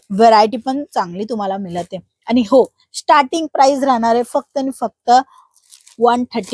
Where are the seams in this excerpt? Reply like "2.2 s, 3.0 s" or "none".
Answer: none